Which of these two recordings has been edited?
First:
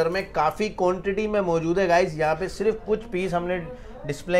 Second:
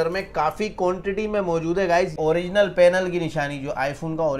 second; 1 cut; at 2.2 s

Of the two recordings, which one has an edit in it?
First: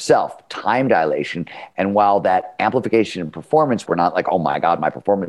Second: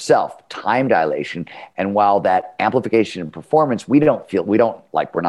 first; 1 cut; at 3.8 s

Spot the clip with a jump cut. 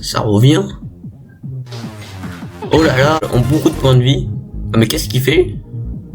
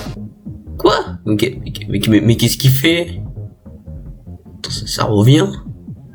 first; 1 cut; at 3.2 s

